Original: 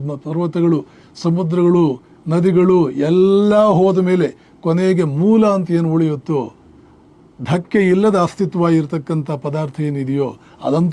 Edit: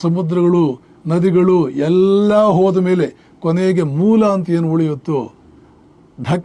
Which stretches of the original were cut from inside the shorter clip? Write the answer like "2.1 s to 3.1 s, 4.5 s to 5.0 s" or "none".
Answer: none